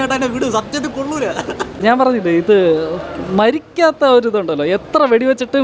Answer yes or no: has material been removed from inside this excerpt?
yes